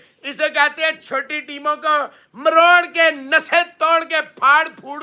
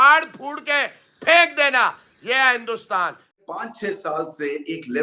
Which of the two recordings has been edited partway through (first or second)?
second